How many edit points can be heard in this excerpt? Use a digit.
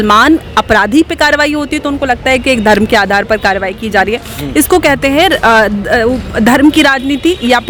0